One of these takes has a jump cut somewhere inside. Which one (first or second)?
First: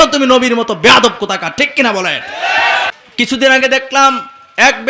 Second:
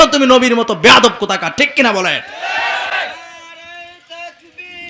first